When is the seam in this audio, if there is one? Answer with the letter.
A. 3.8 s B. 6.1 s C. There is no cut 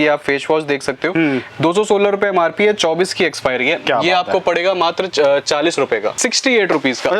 B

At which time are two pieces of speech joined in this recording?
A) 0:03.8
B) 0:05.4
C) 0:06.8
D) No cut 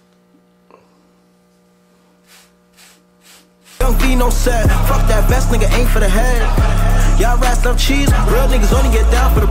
A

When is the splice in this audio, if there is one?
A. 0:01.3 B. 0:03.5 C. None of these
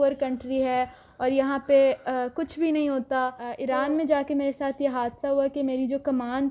B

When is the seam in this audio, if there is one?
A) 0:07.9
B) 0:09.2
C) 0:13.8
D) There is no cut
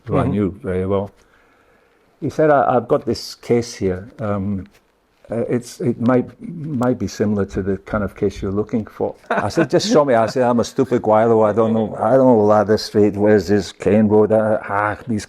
B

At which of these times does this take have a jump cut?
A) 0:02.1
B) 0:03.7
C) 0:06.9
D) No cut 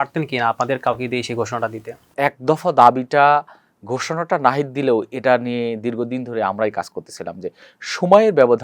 A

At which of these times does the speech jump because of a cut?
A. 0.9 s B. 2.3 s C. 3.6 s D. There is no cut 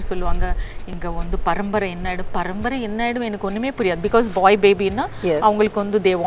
A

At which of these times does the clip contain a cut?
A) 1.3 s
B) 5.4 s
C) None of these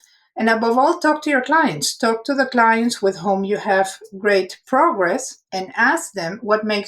B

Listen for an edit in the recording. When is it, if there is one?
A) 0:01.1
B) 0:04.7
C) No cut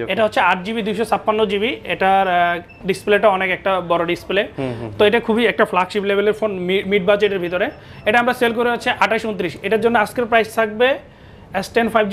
C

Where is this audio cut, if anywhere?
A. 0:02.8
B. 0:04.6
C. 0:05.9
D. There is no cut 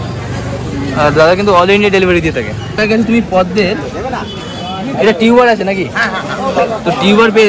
A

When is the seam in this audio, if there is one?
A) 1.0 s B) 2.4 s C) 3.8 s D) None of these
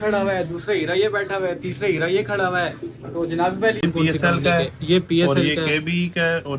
C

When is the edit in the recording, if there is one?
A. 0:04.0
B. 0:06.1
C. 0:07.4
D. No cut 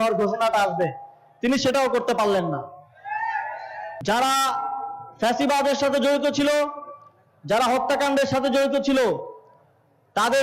A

